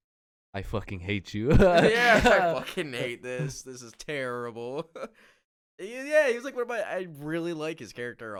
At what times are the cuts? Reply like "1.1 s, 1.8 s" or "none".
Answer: none

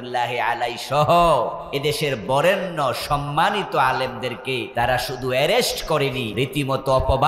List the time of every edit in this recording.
1.6 s, 4.7 s, 6.3 s

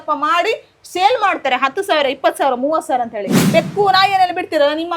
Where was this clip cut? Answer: 3.4 s

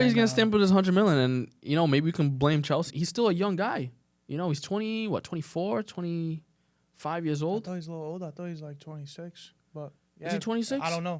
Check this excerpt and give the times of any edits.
2.9 s

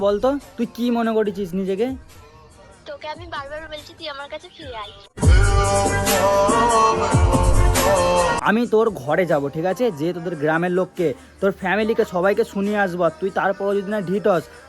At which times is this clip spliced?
8.4 s

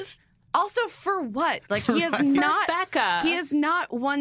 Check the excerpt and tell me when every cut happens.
none

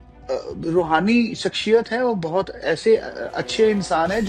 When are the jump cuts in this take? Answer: none

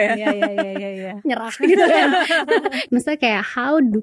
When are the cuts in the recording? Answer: 2.8 s

